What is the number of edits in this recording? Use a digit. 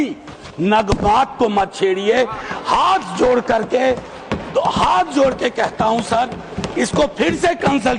0